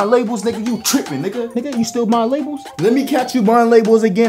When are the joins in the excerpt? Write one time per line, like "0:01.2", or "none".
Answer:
0:01.5
0:02.7